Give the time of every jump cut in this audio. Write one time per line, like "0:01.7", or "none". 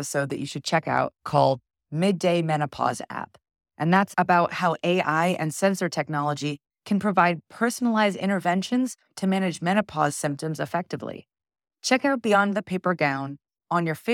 none